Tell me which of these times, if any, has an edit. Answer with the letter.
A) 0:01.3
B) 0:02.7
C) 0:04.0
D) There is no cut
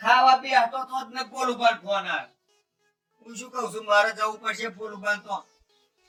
D